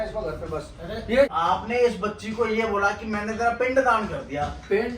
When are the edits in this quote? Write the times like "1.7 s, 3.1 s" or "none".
1.3 s